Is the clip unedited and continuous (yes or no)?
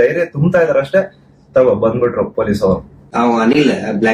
no